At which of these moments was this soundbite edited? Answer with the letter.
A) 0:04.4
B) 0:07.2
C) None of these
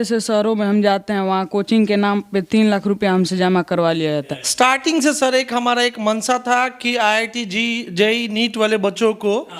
A